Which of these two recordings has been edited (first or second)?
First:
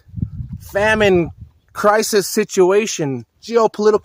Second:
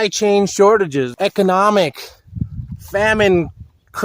second